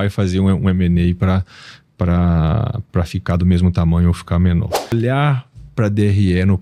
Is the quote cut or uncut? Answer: cut